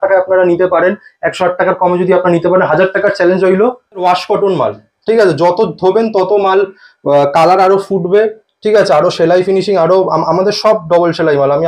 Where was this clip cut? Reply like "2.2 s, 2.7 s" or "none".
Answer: 4.0 s